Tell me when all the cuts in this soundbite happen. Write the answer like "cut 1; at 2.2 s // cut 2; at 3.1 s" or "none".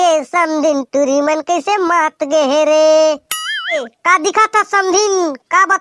cut 1; at 3.8 s

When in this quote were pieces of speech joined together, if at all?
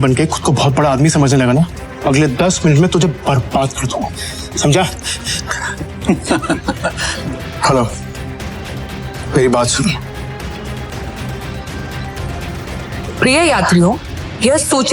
cut 1; at 1.8 s // cut 2; at 7.1 s // cut 3; at 10.9 s

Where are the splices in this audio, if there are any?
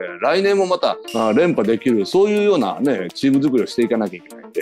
none

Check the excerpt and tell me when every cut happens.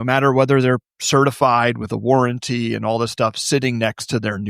cut 1; at 0.9 s

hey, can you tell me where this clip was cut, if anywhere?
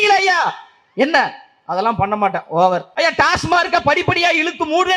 cut 1; at 2.9 s

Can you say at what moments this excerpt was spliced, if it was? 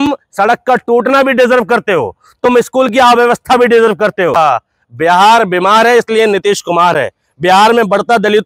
cut 1; at 4.4 s

